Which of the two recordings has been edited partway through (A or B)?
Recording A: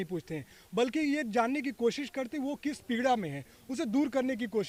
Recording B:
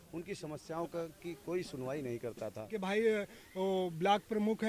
B